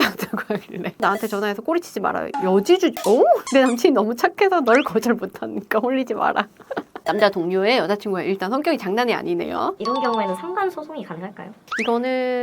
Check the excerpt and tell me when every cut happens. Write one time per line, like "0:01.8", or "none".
0:01.0
0:09.8